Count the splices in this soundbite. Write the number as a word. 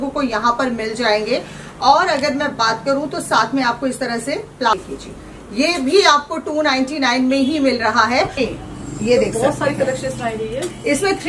two